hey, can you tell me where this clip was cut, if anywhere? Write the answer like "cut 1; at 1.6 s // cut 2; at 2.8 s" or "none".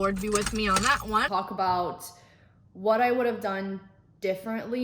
cut 1; at 1.3 s